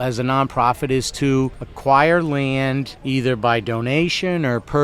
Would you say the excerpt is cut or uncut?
cut